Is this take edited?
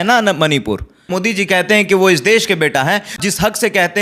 yes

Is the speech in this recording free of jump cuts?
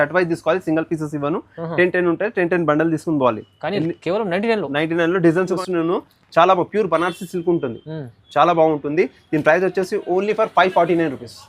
no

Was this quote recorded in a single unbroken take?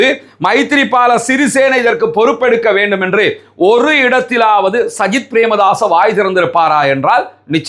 yes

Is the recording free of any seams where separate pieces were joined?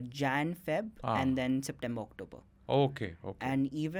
yes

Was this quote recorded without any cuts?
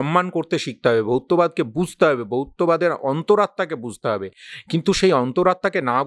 yes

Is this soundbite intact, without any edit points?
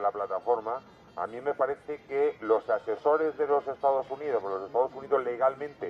no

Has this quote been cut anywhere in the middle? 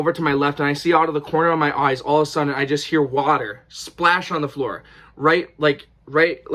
no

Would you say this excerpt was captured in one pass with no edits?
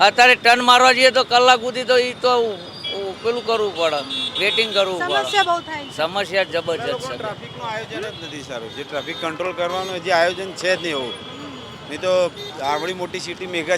yes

